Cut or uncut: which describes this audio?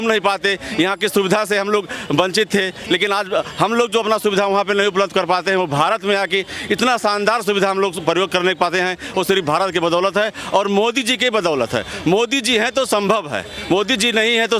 uncut